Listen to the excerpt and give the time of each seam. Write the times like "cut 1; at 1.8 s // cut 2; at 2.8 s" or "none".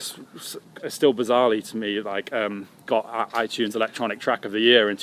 none